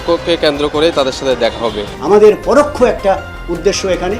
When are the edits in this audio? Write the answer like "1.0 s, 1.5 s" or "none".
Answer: 1.9 s